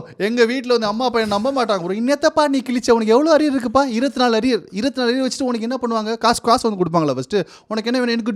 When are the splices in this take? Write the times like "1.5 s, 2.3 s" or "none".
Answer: none